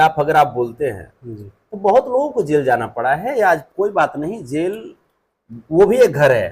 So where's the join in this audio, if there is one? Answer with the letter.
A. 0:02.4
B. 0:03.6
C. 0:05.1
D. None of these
B